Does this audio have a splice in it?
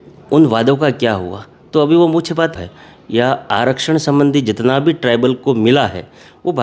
yes; 1 cut; at 2.5 s

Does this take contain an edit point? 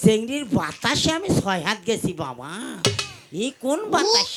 no; 0 cuts

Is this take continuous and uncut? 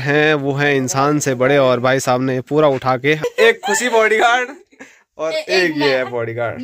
no; 1 cut; at 3.2 s

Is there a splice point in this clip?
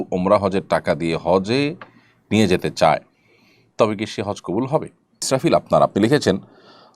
yes; 1 cut; at 5.2 s

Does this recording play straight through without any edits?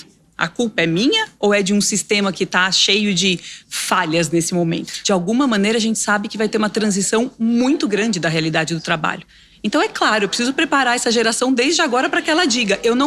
no; 1 cut; at 4.9 s

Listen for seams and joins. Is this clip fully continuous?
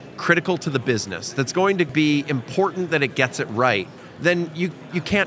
no; 1 cut; at 1.9 s

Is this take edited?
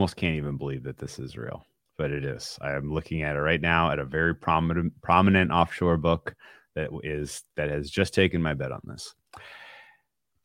no; 0 cuts

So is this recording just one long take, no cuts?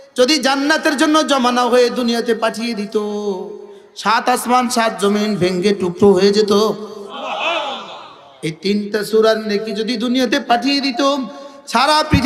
yes; 0 cuts

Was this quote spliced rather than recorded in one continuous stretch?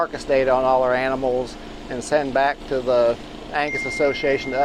no; 0 cuts

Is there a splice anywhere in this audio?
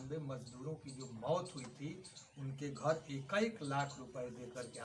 no; 0 cuts

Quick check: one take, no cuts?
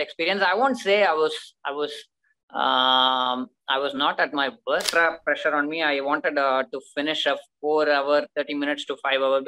no; 1 cut; at 4.9 s

